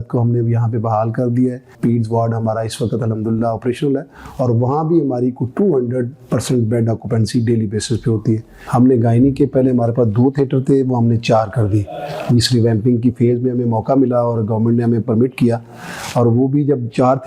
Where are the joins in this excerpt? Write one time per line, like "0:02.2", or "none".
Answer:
0:01.7
0:08.5